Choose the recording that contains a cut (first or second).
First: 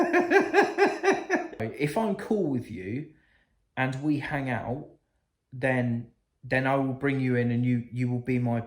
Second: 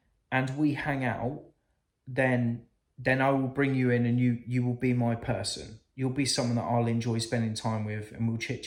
first